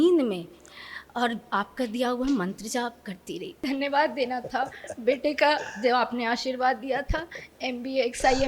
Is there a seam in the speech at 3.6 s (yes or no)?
yes